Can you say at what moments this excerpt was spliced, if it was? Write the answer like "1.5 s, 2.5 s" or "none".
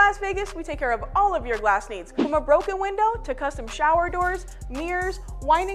2.2 s, 3.3 s, 4.9 s